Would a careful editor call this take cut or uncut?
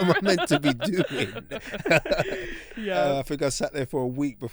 uncut